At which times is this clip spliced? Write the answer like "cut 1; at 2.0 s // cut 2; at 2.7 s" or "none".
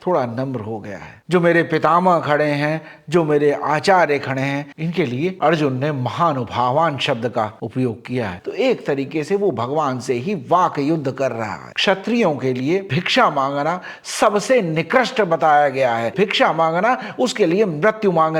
cut 1; at 1.1 s // cut 2; at 8.3 s // cut 3; at 11.7 s